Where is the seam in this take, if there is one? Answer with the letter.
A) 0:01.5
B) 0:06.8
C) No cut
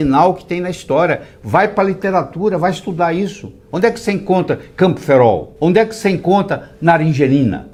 C